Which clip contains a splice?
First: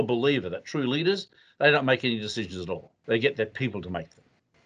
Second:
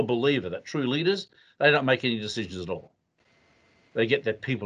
first; 1 cut; at 2.9 s

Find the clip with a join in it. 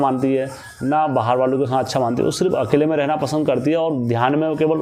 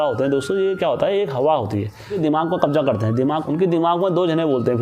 second; 2 cuts; at 2.2 s, 3.5 s

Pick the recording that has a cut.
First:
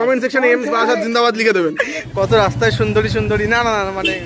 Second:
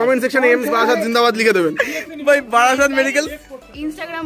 first; 1 cut; at 2.0 s

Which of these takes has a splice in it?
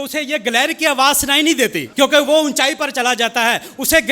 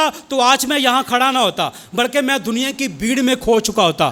first; 1 cut; at 1.8 s

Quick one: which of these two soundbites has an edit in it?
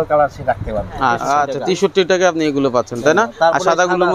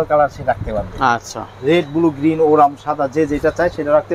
first; 1 cut; at 1.2 s

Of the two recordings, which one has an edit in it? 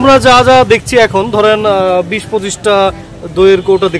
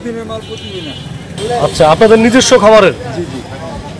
second; 1 cut; at 1.3 s

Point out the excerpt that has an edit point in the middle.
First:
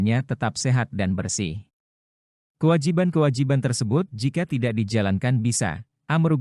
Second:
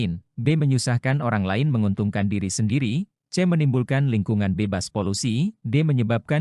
first; 1 cut; at 4.1 s

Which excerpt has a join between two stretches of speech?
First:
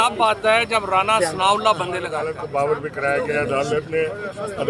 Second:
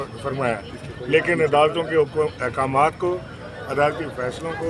first; 1 cut; at 2.3 s

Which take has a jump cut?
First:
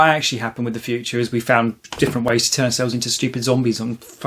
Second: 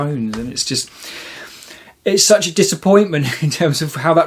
first; 1 cut; at 1.8 s

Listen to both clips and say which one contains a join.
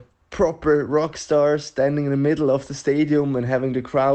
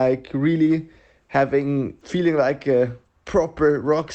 second; 1 cut; at 2.0 s

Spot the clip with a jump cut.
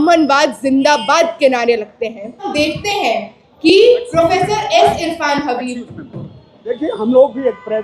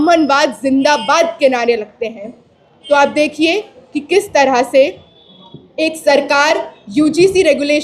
first; 1 cut; at 2.5 s

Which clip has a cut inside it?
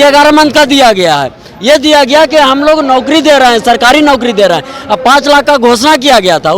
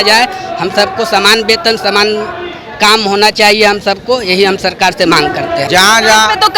second; 1 cut; at 5.7 s

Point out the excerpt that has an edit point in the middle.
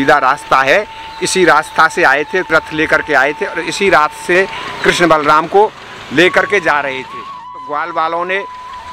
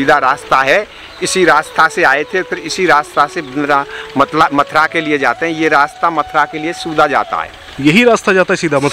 first; 3 cuts; at 2.5 s, 4.3 s, 7.6 s

